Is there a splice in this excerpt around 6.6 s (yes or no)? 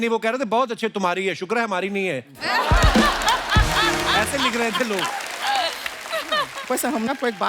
yes